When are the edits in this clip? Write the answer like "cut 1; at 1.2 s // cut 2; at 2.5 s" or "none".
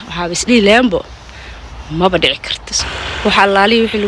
cut 1; at 2.7 s

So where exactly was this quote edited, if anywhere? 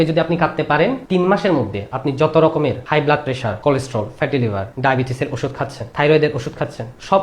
cut 1; at 1.0 s // cut 2; at 3.1 s // cut 3; at 4.7 s

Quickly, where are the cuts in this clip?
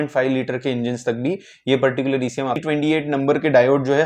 cut 1; at 2.6 s

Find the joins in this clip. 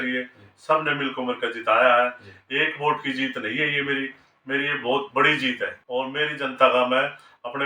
cut 1; at 5.7 s

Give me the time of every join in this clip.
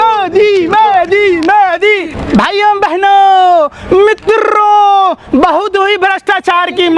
cut 1; at 2.1 s

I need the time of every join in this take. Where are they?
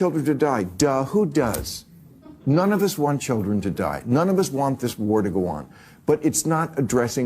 none

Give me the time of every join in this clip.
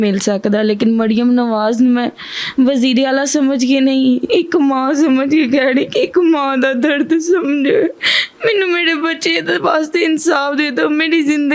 none

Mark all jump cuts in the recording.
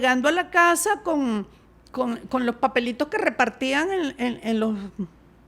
none

